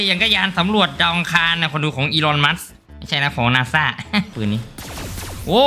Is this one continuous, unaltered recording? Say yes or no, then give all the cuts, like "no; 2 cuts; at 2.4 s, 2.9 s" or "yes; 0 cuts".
no; 1 cut; at 4.3 s